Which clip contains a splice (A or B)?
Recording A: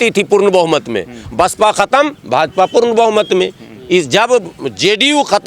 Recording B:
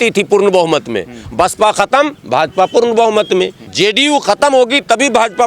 B